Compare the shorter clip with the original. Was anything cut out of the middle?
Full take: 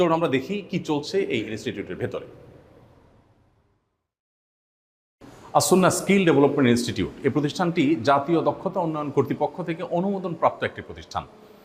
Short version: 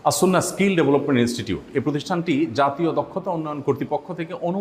no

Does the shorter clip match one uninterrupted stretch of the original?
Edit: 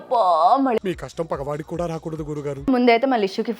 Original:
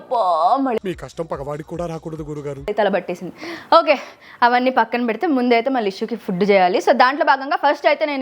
no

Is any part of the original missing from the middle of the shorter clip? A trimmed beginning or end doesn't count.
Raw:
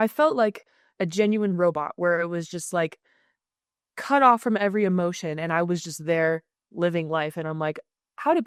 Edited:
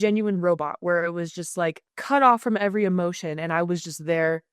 yes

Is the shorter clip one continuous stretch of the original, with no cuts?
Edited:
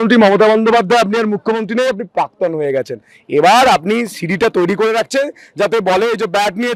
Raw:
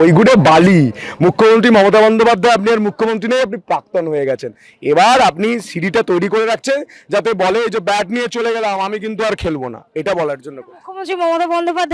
yes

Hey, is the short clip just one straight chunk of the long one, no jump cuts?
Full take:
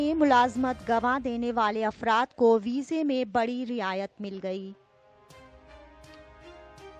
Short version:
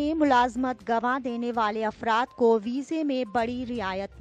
yes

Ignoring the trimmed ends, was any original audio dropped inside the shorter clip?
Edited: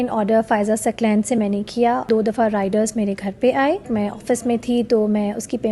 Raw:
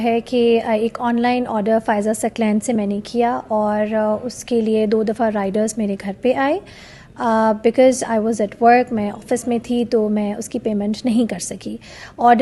yes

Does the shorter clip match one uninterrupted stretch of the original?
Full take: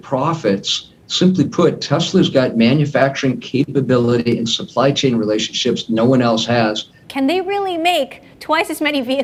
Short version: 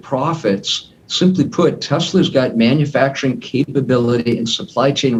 yes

